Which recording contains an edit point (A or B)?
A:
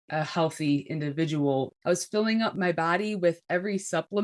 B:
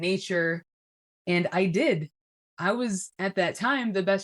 A